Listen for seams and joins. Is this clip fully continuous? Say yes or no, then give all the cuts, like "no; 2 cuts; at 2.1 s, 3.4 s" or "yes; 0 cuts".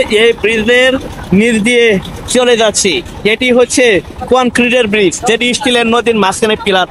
yes; 0 cuts